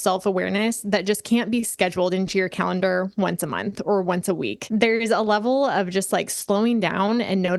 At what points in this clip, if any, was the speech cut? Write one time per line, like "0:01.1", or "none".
0:04.6